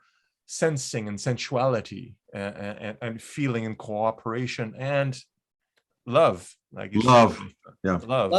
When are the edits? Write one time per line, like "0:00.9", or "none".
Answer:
none